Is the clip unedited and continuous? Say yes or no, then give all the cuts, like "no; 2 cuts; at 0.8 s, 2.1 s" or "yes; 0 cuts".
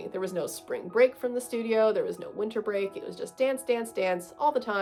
yes; 0 cuts